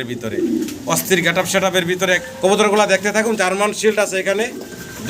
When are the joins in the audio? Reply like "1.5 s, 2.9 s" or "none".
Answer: 2.3 s